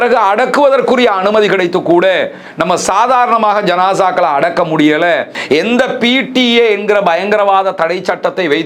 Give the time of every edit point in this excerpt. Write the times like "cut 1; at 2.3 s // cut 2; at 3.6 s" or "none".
cut 1; at 5.3 s